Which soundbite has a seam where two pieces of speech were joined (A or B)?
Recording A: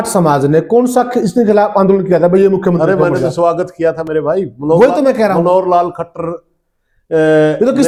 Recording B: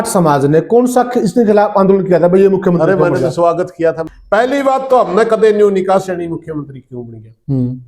B